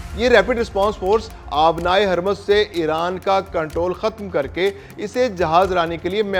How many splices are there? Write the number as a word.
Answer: zero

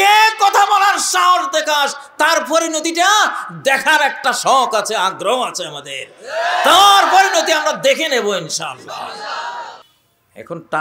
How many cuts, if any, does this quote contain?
one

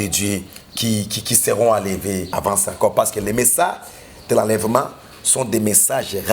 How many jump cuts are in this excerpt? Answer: one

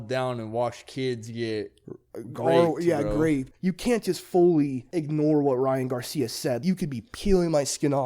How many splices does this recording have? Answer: three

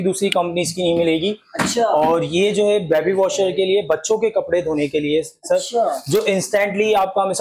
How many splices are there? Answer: zero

